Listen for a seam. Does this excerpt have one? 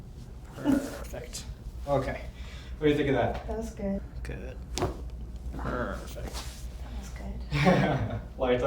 yes; 1 cut; at 4.0 s

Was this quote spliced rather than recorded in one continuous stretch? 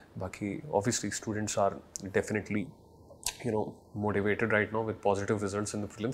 no; 0 cuts

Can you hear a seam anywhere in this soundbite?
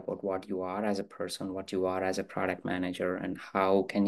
no; 0 cuts

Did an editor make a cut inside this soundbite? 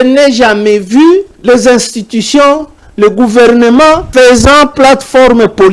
yes; 2 cuts; at 1.3 s, 4.1 s

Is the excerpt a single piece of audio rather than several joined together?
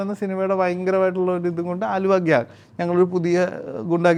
yes; 0 cuts

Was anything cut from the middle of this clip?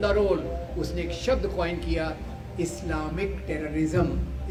no; 0 cuts

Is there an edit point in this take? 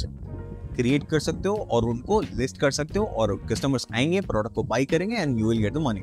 no; 0 cuts

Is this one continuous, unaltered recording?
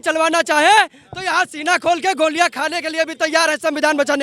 yes; 0 cuts

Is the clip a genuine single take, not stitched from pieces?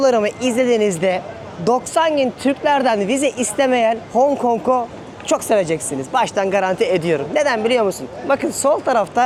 yes; 0 cuts

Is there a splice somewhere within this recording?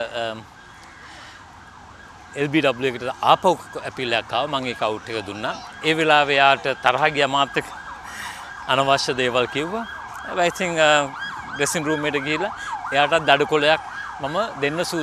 no; 0 cuts

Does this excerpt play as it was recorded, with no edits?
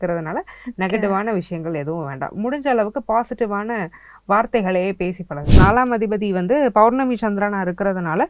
no; 1 cut; at 5.6 s

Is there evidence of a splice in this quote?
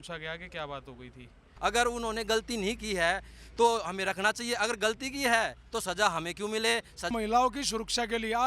yes; 2 cuts; at 1.5 s, 7.1 s

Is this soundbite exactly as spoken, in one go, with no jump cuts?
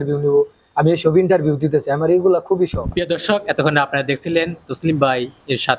yes; 0 cuts

